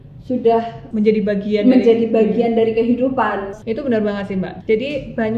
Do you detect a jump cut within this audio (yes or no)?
yes